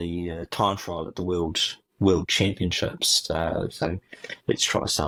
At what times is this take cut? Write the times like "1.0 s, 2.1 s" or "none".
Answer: none